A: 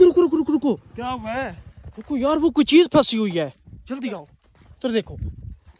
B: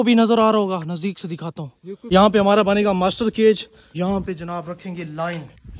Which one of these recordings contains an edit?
B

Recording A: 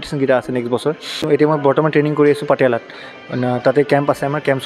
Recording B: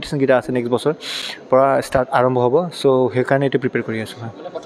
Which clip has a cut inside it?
A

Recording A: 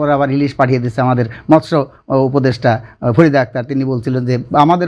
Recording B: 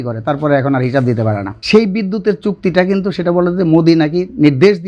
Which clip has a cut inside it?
B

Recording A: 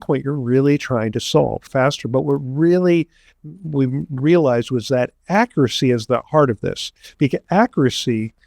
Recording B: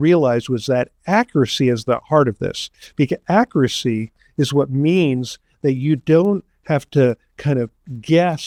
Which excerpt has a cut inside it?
A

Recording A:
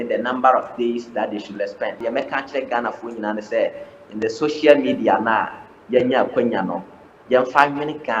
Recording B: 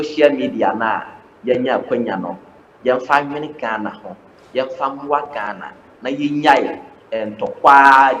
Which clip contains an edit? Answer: A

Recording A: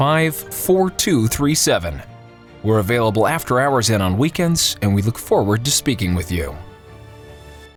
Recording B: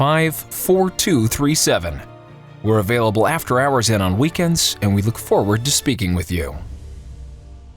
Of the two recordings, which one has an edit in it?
B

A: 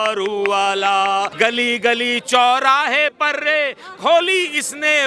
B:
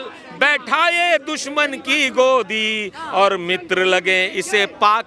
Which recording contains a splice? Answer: A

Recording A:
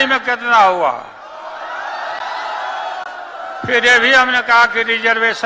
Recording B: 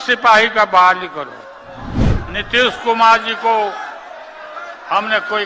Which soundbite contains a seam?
B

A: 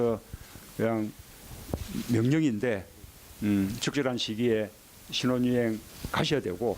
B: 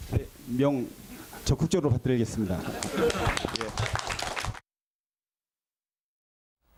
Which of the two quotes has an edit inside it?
A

